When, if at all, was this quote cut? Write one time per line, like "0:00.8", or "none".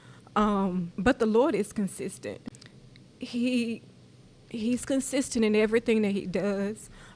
0:00.9
0:02.4